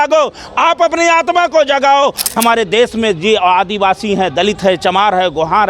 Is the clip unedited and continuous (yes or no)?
no